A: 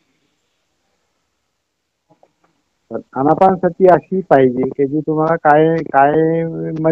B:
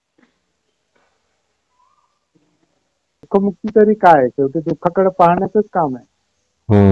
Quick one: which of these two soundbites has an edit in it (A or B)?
B